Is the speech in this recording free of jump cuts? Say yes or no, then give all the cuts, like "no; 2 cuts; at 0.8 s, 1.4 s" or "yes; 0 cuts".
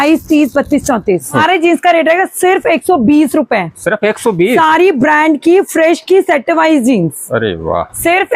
no; 1 cut; at 1.4 s